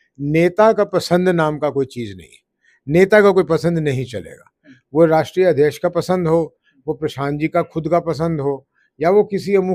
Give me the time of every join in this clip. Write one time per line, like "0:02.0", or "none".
none